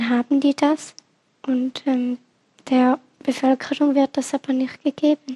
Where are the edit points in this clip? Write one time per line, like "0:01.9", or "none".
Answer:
none